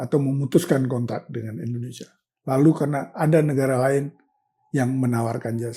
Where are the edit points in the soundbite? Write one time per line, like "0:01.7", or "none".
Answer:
none